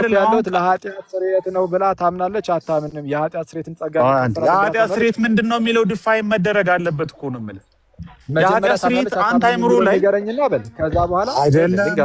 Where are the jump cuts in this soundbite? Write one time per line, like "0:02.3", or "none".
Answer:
none